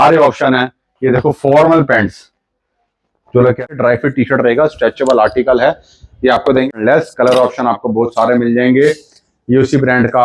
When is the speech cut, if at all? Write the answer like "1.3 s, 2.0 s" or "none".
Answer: 3.6 s, 6.7 s